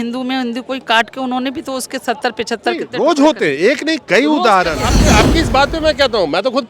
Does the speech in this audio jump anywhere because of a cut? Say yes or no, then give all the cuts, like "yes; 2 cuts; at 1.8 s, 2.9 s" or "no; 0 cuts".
yes; 1 cut; at 5.0 s